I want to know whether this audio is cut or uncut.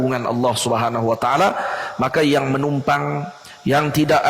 uncut